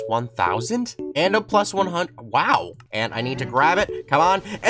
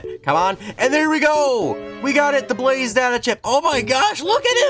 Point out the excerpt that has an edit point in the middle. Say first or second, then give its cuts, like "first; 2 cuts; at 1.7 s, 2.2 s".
first; 2 cuts; at 1.0 s, 2.8 s